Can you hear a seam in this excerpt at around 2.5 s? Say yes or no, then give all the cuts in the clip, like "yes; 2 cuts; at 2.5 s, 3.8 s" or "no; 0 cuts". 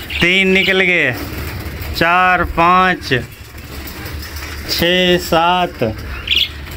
no; 0 cuts